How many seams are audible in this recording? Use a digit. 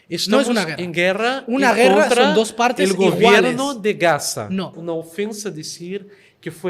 1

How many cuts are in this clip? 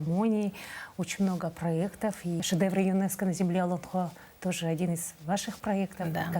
0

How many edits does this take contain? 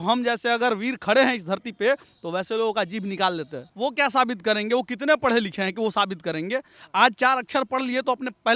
1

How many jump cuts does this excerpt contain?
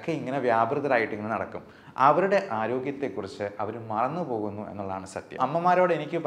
1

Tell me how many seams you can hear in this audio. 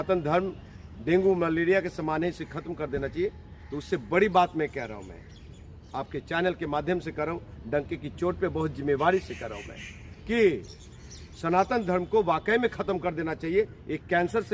0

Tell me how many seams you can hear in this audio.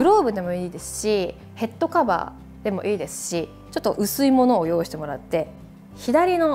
1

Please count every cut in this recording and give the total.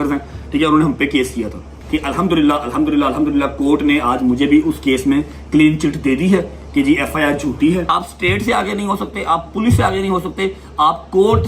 2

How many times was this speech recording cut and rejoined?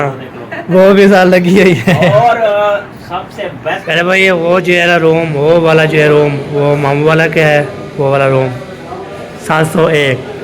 2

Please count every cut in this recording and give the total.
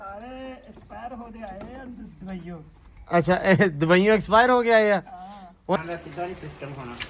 1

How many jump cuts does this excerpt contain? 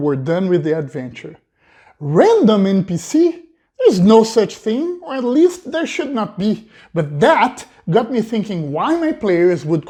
0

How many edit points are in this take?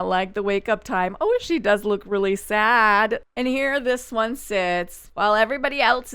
1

